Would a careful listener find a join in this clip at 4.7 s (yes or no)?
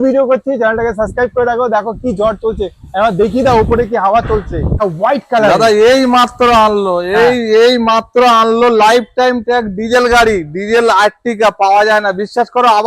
yes